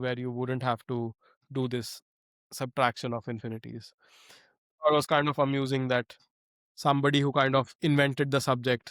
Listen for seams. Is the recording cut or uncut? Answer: uncut